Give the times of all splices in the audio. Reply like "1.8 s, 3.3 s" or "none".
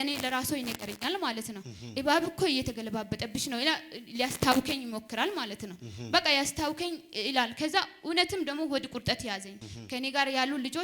9.6 s

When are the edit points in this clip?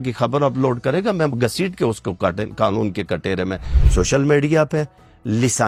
none

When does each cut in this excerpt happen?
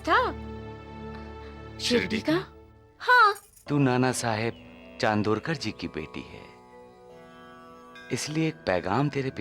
3.5 s

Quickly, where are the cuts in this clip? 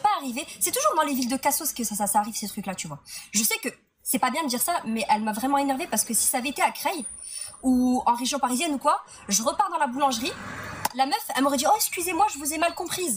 2.7 s, 9.2 s

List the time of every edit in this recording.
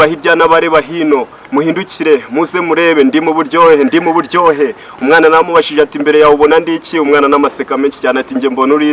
none

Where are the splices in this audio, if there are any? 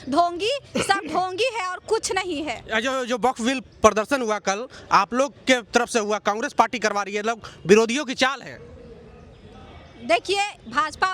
none

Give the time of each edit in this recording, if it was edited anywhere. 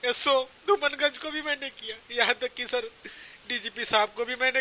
none

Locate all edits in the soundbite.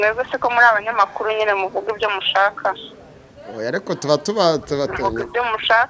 none

